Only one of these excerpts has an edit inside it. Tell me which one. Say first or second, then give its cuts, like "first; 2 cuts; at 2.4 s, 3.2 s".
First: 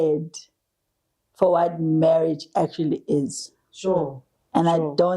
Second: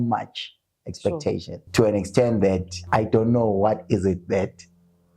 second; 2 cuts; at 1.6 s, 2.7 s